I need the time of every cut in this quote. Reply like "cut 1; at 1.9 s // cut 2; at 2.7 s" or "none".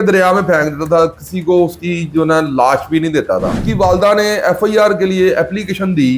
cut 1; at 3.6 s